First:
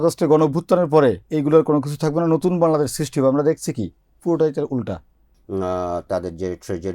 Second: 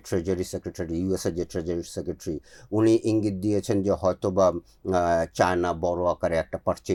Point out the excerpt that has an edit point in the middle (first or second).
first